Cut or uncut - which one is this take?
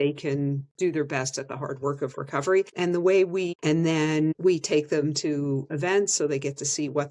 cut